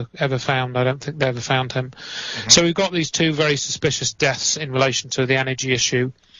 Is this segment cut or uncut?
cut